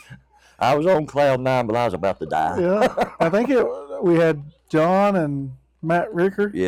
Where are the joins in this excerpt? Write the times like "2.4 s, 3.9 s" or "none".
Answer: none